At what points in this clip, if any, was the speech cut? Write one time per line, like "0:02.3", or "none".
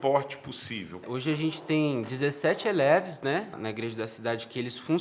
0:01.0
0:03.6